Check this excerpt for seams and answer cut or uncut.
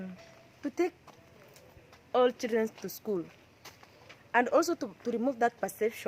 uncut